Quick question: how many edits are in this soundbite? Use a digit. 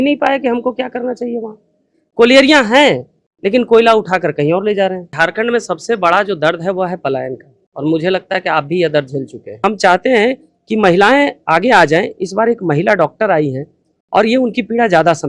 2